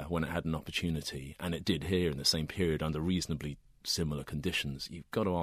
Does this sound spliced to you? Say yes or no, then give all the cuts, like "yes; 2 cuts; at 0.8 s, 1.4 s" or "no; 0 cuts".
no; 0 cuts